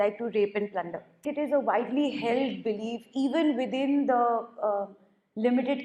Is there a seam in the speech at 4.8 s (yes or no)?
no